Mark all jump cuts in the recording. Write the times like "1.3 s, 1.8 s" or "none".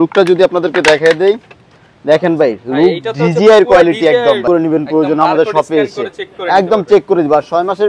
4.4 s